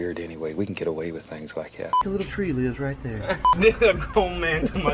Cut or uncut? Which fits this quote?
cut